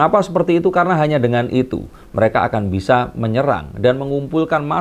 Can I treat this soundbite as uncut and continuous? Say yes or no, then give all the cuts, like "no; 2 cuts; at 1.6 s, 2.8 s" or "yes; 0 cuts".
yes; 0 cuts